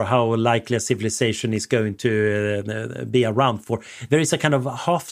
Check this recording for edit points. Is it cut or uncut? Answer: uncut